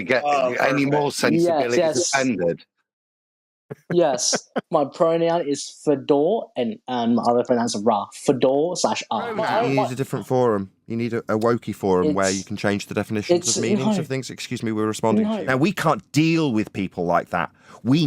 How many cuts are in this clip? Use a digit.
2